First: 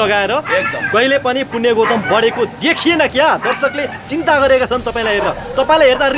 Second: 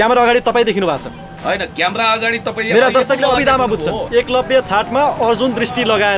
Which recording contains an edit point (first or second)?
second